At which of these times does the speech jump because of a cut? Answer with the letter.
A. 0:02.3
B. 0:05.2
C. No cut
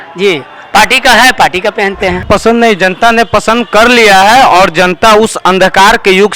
A